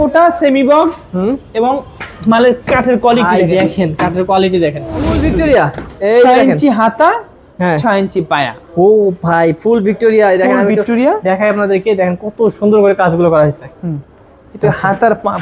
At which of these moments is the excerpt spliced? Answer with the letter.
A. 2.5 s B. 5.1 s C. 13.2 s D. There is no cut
B